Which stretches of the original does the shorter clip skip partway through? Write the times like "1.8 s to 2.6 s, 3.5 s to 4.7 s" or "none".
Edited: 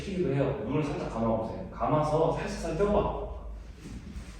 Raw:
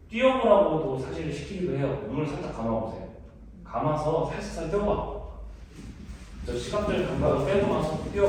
3.1 s to 3.6 s